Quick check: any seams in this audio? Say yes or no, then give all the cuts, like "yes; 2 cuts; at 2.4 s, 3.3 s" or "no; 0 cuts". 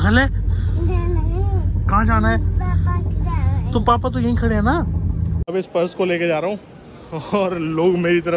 yes; 1 cut; at 5.4 s